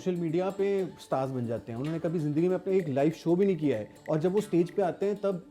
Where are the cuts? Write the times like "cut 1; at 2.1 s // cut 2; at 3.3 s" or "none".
cut 1; at 3.9 s